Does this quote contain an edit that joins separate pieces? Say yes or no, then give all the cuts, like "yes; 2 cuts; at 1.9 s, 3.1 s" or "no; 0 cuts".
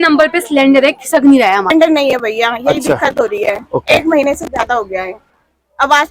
yes; 1 cut; at 1.7 s